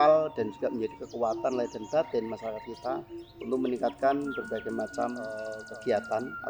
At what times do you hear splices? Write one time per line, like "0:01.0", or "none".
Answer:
0:05.5